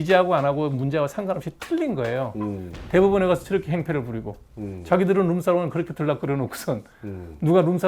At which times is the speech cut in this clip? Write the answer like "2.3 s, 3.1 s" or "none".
none